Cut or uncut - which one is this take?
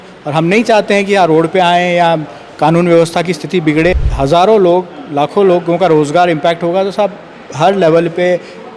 cut